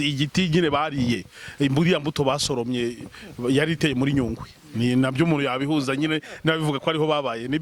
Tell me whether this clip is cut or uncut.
uncut